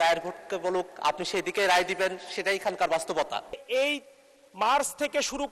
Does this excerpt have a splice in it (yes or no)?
yes